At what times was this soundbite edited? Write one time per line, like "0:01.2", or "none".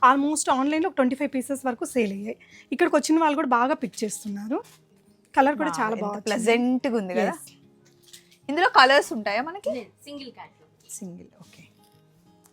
none